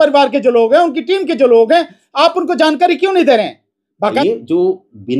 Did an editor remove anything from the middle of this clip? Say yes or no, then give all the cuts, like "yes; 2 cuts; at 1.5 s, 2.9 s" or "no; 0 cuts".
yes; 1 cut; at 4.2 s